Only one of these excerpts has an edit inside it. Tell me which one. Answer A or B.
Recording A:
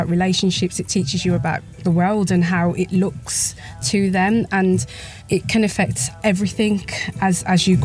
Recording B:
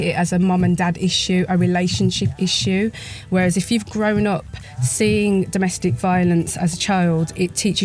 A